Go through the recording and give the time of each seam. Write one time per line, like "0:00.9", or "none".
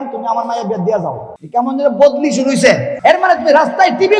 0:01.3
0:02.9